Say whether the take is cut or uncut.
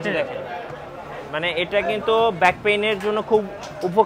uncut